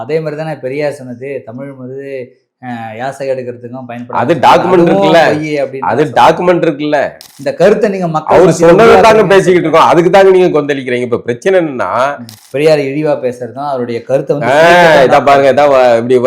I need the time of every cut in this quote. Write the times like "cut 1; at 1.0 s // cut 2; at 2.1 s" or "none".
cut 1; at 7.2 s // cut 2; at 12.3 s